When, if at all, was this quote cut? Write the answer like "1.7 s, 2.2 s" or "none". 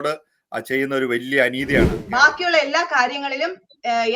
2.0 s

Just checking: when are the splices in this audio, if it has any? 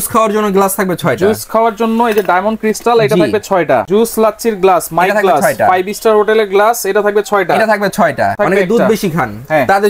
3.9 s, 8.4 s

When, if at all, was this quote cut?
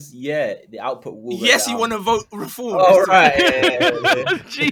none

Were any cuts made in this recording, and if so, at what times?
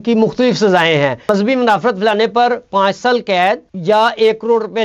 1.3 s

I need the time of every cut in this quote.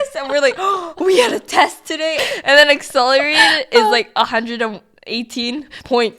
2.2 s

